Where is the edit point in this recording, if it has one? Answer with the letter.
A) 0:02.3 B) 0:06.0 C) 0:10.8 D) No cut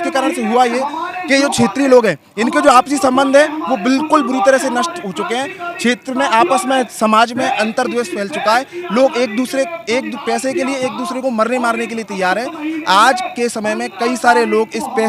D